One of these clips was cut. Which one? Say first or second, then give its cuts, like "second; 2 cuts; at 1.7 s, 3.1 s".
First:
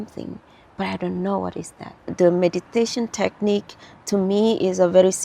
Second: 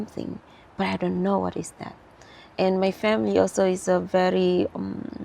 first; 1 cut; at 2.1 s